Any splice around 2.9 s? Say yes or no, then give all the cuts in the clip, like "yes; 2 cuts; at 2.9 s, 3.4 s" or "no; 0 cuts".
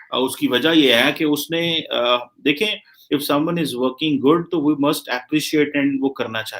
yes; 1 cut; at 2.9 s